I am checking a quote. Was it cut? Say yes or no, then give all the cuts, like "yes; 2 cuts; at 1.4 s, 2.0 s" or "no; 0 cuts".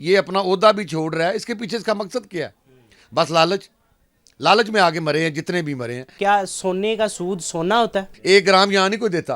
yes; 2 cuts; at 6.1 s, 8.1 s